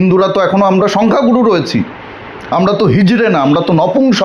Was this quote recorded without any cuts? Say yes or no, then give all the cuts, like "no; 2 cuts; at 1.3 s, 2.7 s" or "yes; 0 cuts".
yes; 0 cuts